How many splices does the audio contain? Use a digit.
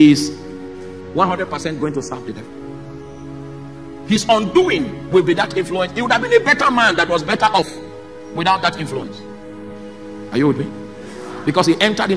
2